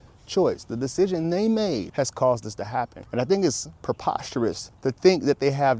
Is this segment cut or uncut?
cut